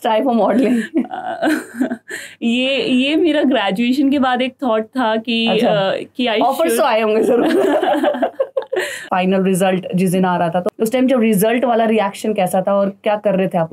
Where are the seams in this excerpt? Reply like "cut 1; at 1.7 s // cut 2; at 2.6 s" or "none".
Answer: cut 1; at 9.1 s // cut 2; at 10.7 s